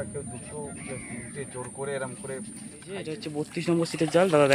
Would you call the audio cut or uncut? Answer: cut